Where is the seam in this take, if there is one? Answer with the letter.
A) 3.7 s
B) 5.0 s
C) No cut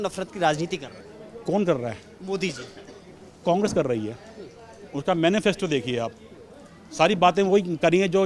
C